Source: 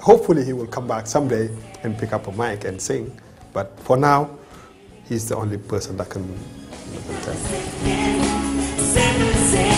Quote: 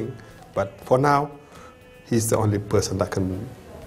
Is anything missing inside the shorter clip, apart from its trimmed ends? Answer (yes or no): no